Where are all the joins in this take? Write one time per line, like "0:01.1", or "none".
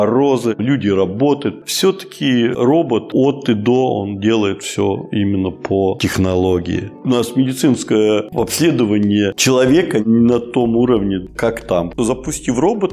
0:01.6
0:07.0
0:11.9